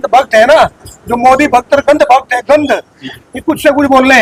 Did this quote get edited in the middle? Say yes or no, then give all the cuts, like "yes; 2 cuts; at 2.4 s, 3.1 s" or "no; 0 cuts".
no; 0 cuts